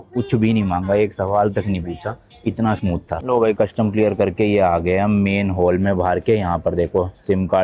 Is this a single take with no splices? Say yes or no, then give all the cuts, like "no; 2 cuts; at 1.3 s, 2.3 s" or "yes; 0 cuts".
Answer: yes; 0 cuts